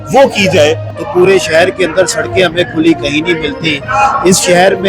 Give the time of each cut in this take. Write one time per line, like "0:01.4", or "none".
0:00.9